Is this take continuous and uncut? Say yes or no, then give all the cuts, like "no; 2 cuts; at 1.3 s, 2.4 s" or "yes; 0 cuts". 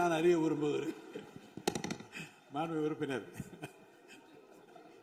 yes; 0 cuts